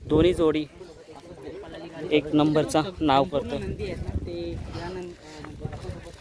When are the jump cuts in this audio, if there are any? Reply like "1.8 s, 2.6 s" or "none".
none